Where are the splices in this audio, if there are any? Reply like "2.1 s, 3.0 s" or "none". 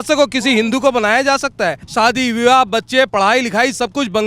1.8 s